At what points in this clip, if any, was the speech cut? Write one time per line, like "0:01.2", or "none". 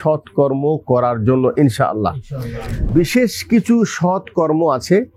0:02.9